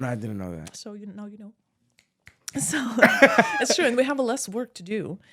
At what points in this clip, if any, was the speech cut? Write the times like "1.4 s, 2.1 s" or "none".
none